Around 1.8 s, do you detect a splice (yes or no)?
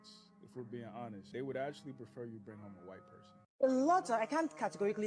yes